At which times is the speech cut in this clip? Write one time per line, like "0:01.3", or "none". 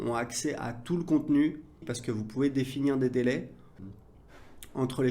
0:01.9
0:03.7